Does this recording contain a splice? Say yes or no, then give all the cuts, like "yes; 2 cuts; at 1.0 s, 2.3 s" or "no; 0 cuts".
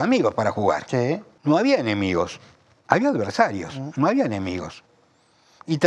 yes; 1 cut; at 1.3 s